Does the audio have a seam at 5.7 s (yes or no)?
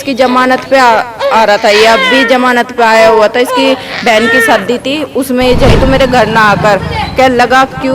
yes